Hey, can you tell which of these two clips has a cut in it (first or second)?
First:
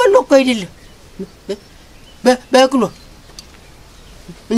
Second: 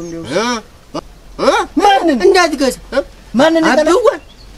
second